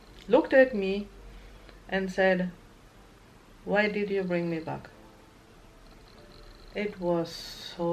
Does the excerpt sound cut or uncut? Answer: uncut